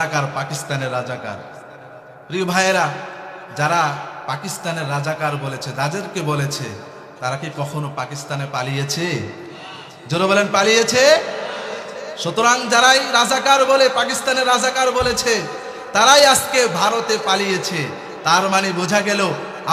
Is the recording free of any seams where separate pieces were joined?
yes; 0 cuts

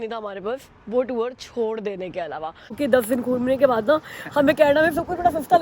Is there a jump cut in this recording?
yes; 1 cut; at 2.7 s

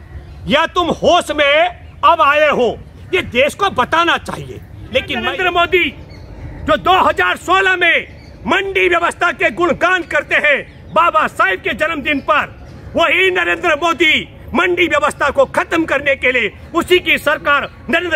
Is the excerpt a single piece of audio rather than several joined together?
no; 1 cut; at 5.2 s

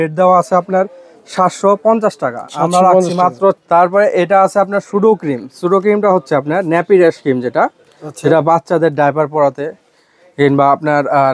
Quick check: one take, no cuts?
no; 1 cut; at 3.6 s

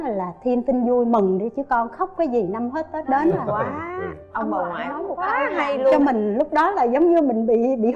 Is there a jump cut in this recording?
no; 0 cuts

